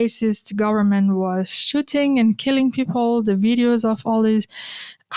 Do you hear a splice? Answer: no; 0 cuts

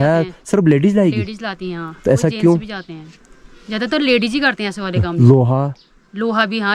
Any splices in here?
no; 0 cuts

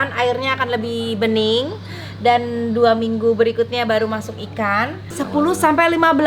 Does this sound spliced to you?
yes; 1 cut; at 5.0 s

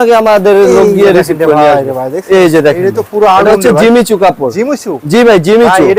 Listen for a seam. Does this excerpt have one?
no; 0 cuts

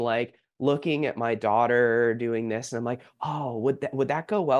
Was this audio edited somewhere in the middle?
no; 0 cuts

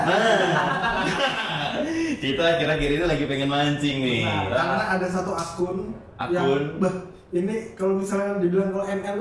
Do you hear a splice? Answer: no; 0 cuts

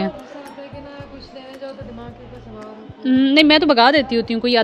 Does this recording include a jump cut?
no; 0 cuts

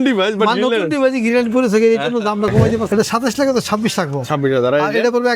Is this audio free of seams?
no; 1 cut; at 2.8 s

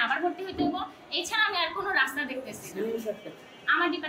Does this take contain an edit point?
no; 0 cuts

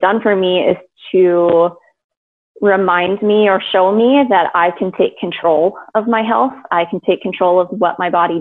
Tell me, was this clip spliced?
no; 0 cuts

